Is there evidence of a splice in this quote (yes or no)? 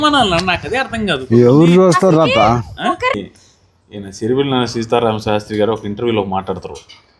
yes